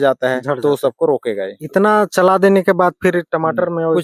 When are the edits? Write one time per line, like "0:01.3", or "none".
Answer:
0:01.6